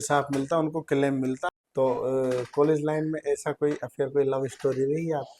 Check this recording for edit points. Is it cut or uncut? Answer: cut